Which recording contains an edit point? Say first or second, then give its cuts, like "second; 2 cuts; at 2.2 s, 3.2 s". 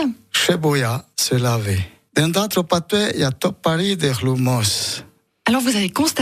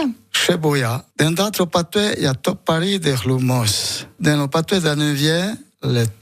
second; 2 cuts; at 1.0 s, 4.0 s